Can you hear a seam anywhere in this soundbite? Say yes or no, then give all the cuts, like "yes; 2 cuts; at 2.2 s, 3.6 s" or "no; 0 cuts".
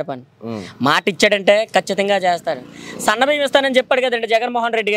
no; 0 cuts